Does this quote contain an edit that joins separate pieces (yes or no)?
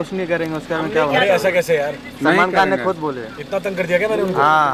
no